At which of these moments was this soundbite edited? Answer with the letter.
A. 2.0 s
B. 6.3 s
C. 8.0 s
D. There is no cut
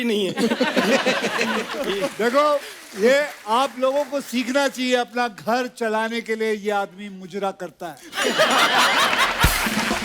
A